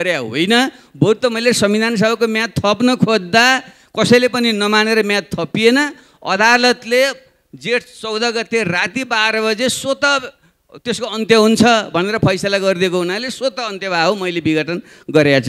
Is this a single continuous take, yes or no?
yes